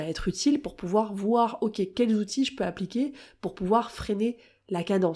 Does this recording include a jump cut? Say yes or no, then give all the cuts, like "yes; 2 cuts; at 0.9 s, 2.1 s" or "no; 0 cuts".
no; 0 cuts